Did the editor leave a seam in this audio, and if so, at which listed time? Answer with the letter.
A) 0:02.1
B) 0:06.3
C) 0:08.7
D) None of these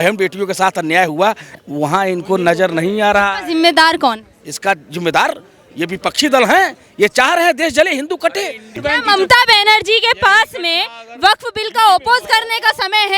C